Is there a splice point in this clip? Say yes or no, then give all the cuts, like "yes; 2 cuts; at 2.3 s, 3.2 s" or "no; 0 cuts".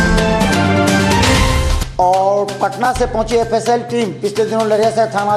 no; 0 cuts